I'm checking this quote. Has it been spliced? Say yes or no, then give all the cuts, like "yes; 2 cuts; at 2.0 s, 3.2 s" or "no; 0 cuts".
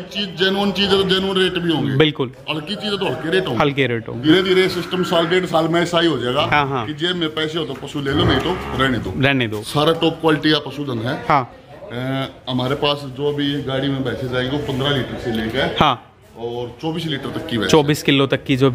yes; 2 cuts; at 4.2 s, 9.6 s